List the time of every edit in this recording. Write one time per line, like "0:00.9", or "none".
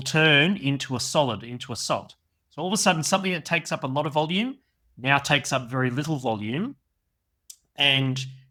none

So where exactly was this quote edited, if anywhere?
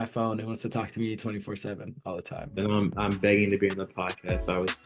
none

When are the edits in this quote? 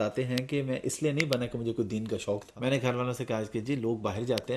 0:02.5

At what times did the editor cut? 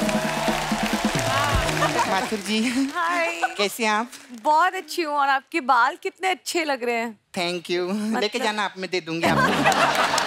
0:02.1

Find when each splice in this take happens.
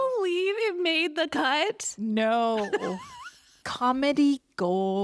0:03.6

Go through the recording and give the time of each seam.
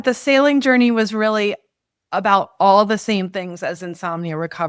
none

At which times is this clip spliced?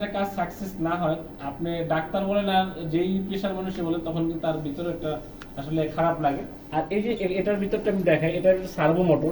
0:06.7

